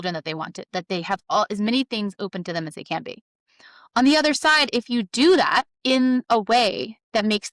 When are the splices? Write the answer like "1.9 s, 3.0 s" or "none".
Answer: 5.7 s